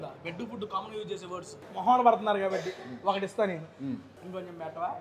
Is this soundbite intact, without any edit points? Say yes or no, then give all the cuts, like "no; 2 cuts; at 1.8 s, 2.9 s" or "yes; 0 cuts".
no; 2 cuts; at 1.6 s, 4.1 s